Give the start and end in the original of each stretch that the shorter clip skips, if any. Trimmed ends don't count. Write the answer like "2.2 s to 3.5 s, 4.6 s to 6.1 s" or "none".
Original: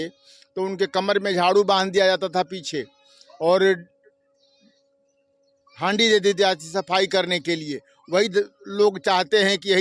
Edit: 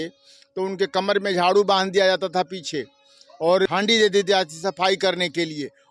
3.7 s to 5.8 s